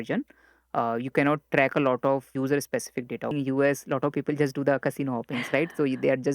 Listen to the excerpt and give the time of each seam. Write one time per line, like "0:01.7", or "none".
0:02.3
0:03.3

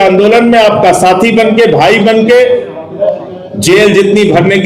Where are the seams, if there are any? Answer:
none

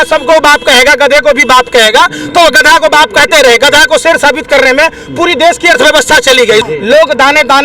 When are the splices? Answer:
0:06.6

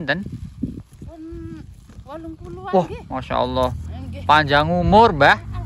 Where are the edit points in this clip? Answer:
none

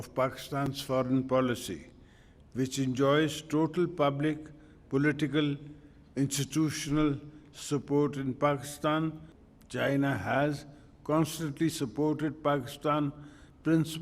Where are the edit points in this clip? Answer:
0:09.2

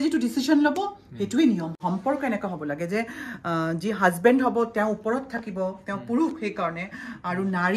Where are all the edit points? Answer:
0:01.7

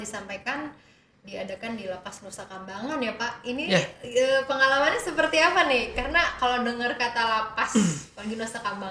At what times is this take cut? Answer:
none

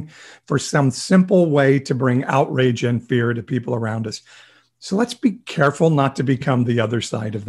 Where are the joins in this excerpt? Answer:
none

